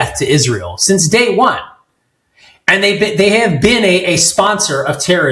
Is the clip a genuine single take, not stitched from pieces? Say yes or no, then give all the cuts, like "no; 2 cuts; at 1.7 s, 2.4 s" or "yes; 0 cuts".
yes; 0 cuts